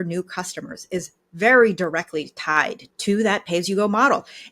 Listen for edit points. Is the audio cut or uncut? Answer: cut